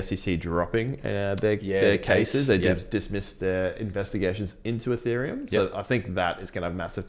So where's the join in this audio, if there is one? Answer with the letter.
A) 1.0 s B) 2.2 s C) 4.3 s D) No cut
D